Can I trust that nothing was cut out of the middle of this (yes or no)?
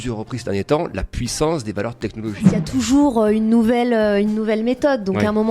no